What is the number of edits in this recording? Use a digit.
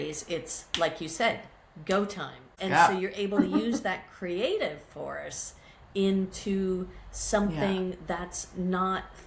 0